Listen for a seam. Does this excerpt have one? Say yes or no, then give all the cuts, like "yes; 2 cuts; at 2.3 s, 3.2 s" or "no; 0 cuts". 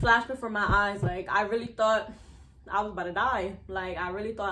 no; 0 cuts